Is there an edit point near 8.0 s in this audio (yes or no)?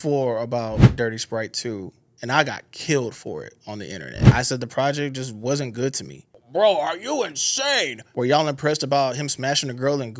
no